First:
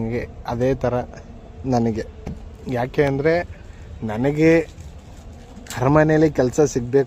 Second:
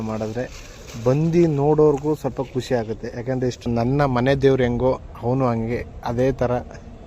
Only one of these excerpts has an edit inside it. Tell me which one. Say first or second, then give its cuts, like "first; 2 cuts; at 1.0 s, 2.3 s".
second; 1 cut; at 3.7 s